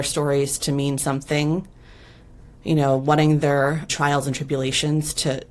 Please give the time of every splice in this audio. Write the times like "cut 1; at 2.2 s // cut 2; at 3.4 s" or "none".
none